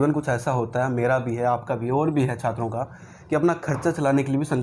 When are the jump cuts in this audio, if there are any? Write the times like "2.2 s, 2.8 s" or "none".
none